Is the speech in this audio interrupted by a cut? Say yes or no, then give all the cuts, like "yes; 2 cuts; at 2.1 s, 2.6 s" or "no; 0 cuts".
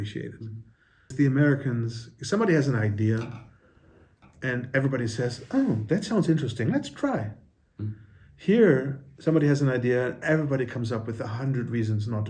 yes; 1 cut; at 1.1 s